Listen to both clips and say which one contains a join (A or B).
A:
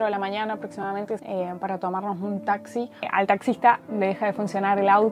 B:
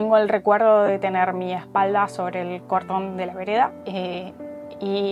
A